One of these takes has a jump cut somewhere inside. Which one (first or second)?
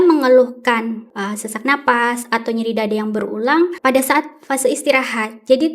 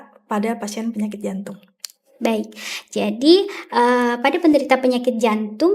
first